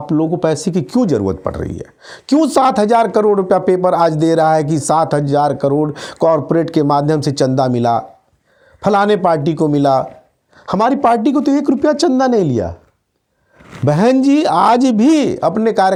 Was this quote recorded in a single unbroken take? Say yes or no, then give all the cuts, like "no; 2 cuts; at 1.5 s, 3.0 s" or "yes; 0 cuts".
yes; 0 cuts